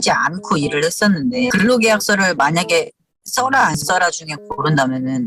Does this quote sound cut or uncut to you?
uncut